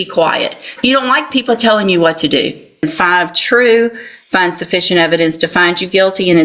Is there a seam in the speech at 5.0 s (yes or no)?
no